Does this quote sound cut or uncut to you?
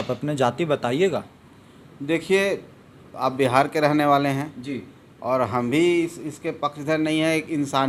uncut